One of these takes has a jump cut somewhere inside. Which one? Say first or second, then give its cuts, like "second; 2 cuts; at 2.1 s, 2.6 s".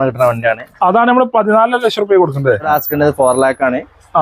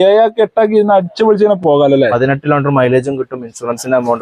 first; 1 cut; at 2.7 s